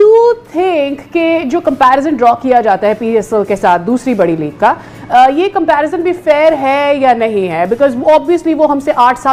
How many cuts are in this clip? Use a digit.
0